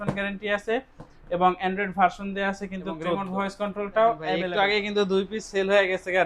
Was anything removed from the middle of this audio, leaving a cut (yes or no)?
yes